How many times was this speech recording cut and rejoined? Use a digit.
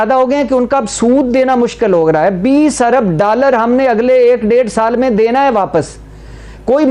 0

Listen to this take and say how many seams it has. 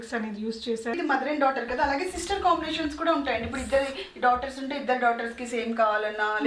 1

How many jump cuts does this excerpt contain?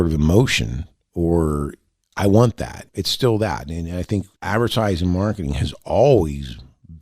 0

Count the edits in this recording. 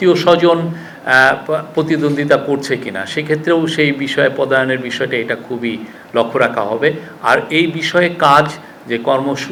0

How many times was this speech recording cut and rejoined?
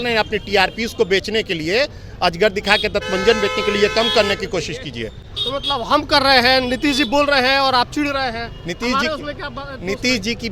0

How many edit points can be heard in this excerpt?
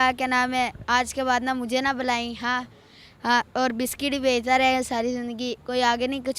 0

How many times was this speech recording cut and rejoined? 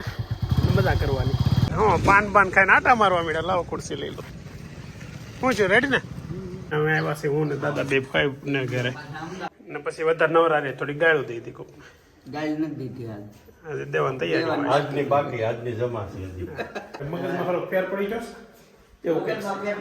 4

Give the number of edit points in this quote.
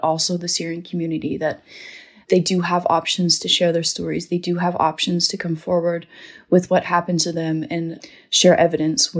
0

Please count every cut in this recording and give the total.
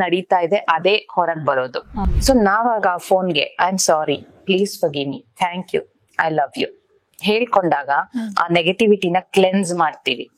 1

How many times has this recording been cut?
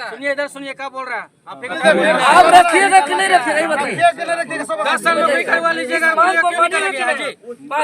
1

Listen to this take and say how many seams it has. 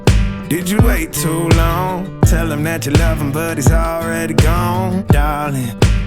1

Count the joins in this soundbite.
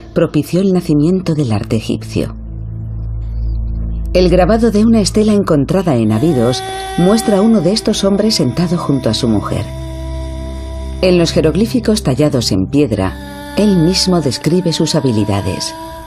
1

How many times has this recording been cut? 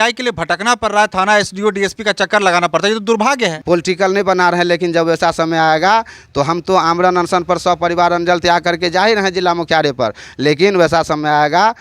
1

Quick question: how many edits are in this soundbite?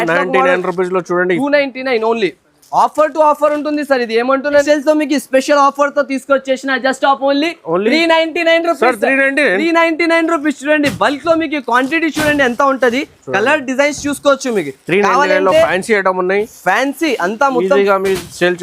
1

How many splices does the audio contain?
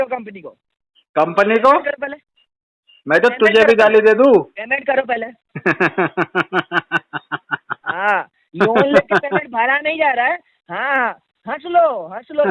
1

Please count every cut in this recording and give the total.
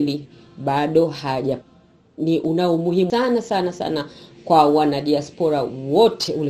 2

